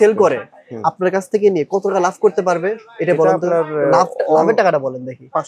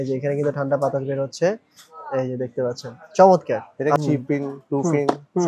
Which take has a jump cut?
second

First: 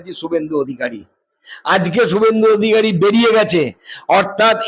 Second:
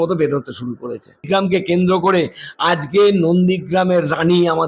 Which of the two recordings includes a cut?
second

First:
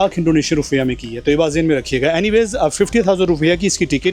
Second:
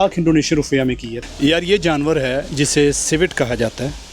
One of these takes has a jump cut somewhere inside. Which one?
second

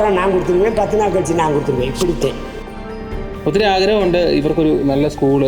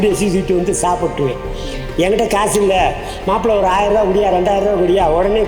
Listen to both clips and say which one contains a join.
first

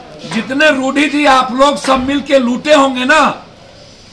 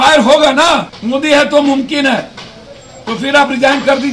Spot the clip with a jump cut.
second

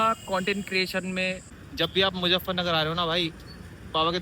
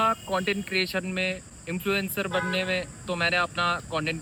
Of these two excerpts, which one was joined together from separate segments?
first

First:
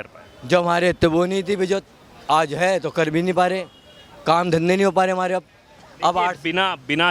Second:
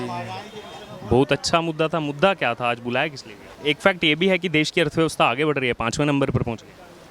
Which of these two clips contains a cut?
second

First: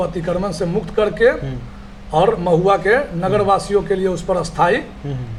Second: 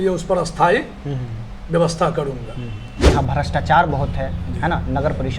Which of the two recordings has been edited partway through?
second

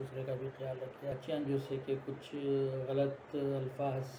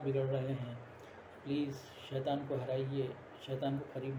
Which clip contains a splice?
first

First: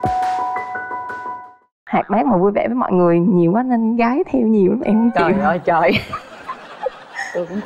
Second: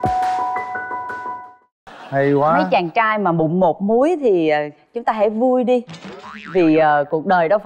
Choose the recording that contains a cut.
first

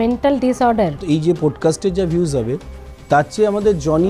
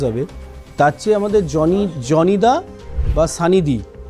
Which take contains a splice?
first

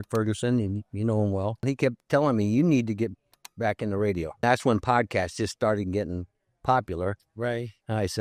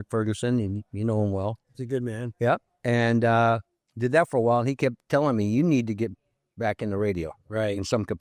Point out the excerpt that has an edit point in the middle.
first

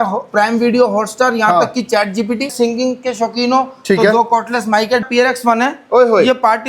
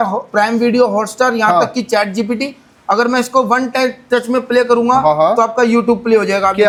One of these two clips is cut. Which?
first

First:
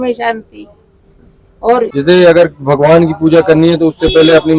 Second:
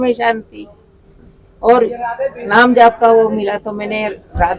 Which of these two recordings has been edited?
first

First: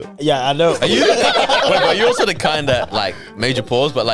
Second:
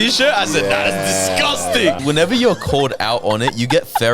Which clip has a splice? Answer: second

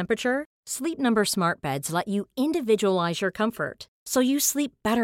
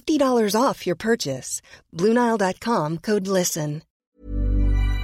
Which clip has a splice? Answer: second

